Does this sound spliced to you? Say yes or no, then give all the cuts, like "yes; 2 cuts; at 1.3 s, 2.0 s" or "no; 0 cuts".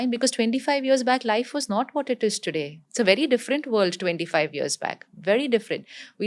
yes; 1 cut; at 2.8 s